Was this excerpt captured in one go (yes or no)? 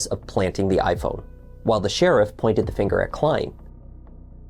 yes